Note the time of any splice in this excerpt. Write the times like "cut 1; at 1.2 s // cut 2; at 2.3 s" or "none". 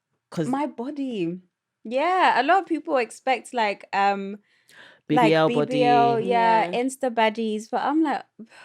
none